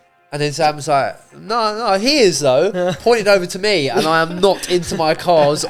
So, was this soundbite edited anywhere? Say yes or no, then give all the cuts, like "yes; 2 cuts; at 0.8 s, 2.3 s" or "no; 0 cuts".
no; 0 cuts